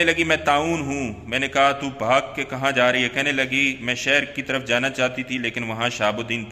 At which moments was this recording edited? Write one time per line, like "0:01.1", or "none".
none

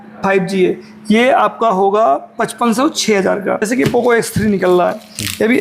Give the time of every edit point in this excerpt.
0:03.6

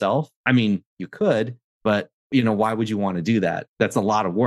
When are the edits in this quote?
0:02.2
0:03.6

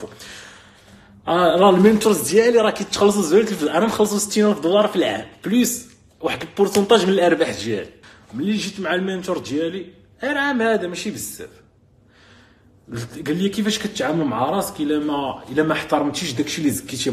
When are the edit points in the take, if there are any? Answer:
0:08.0

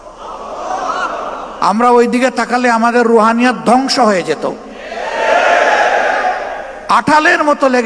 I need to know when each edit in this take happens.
none

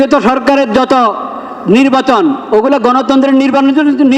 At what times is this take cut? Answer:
none

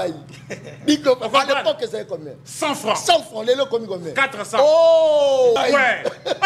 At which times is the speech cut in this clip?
0:05.6

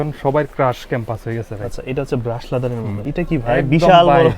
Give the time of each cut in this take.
0:03.0

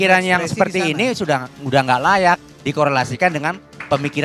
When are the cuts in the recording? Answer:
none

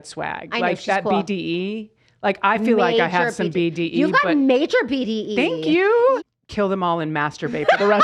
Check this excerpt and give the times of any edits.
0:06.2

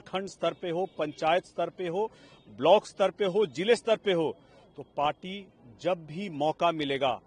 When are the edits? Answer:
none

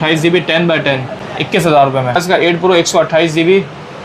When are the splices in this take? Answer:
0:01.2
0:02.2

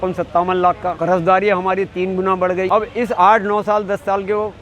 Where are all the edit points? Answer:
0:01.0
0:02.7

